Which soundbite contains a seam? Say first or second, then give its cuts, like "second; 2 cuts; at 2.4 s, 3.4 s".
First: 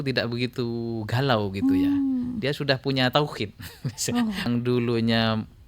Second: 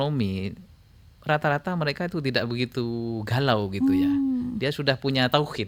first; 1 cut; at 4.5 s